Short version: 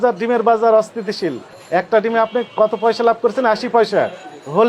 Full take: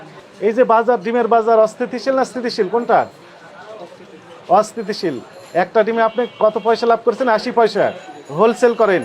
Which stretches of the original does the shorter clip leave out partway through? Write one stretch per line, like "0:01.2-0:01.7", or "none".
0:01.9-0:04.9

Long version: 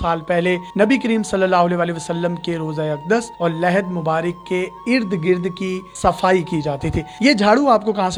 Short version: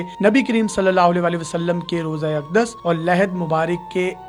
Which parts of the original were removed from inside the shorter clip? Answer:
none

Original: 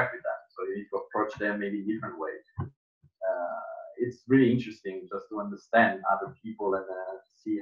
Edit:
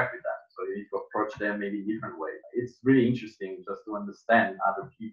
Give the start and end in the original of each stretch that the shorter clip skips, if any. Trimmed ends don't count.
0:02.4-0:03.9

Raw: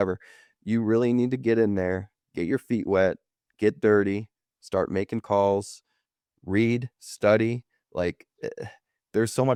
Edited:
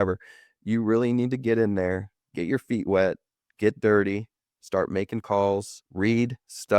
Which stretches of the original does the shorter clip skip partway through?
0:05.8-0:06.3

